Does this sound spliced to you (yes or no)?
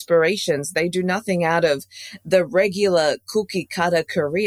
no